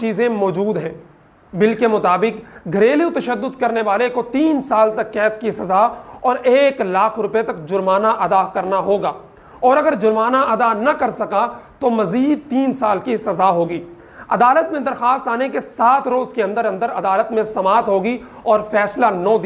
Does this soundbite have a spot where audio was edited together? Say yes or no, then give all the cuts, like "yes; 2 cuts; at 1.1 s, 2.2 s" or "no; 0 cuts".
no; 0 cuts